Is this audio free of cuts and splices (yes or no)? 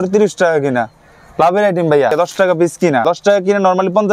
no